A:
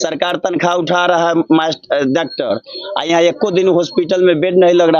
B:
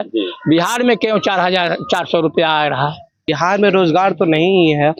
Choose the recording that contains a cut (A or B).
B